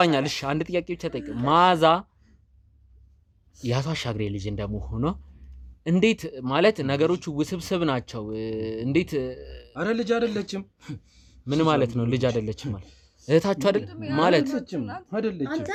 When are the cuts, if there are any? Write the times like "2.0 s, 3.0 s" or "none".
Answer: none